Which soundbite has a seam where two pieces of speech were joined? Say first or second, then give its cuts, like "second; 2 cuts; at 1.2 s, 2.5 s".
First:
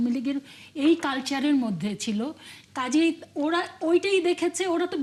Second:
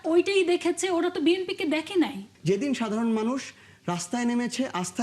second; 1 cut; at 2.3 s